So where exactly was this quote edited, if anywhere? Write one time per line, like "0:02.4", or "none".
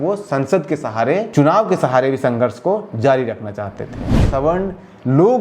0:01.3
0:04.3